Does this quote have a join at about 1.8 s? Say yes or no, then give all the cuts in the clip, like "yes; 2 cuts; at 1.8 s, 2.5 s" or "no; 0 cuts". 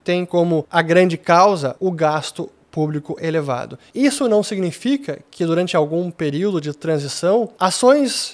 yes; 2 cuts; at 1.8 s, 3.8 s